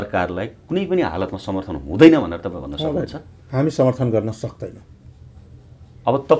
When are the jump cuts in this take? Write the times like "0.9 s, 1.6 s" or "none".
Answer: none